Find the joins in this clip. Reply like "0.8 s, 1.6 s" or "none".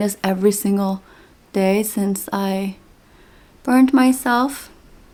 none